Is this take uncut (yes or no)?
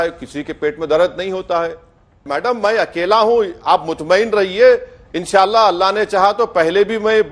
no